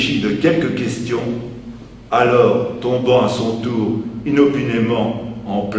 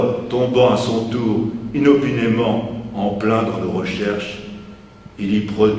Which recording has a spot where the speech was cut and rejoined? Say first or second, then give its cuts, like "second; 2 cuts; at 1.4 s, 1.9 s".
second; 1 cut; at 4.3 s